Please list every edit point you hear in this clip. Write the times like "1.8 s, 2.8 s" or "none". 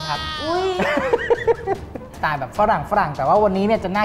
2.1 s